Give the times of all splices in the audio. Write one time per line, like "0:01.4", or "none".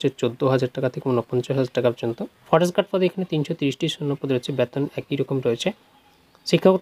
0:02.3